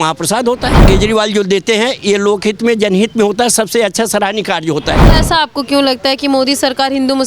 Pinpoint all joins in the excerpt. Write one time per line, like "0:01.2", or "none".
0:00.8
0:05.1